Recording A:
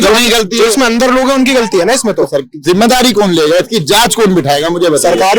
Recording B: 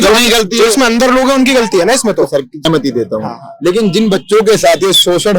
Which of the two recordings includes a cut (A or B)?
B